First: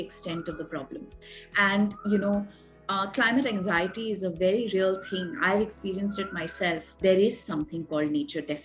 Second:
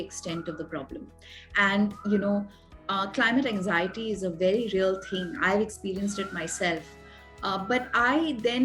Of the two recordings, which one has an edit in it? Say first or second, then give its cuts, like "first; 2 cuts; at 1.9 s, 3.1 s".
first; 1 cut; at 7.0 s